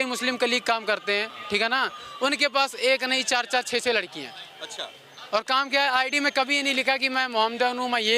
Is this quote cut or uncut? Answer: uncut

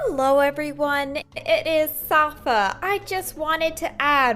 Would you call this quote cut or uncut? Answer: cut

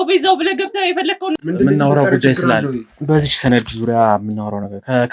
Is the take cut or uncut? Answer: cut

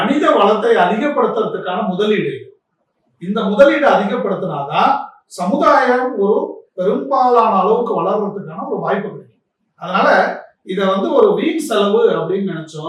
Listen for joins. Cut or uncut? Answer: uncut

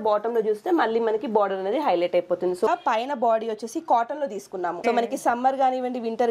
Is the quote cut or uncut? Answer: cut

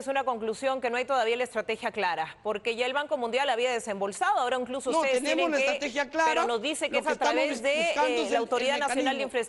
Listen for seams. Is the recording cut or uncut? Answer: uncut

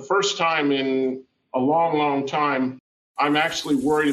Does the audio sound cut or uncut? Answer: uncut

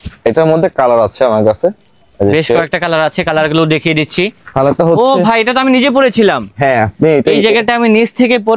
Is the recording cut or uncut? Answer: uncut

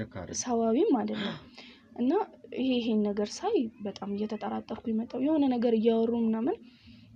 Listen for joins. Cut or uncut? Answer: uncut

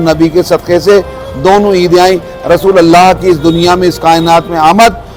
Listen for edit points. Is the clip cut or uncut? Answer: uncut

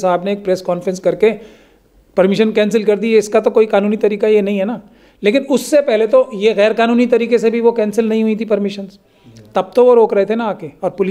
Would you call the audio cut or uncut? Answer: uncut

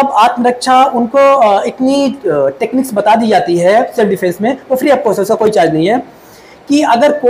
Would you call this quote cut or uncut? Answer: uncut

